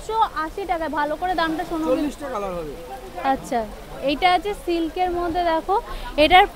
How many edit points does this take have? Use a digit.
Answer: 1